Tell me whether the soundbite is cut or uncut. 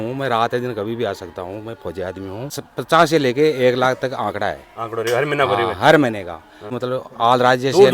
cut